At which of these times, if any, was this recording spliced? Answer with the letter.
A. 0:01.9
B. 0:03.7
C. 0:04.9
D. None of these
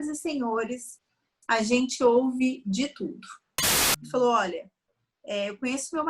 B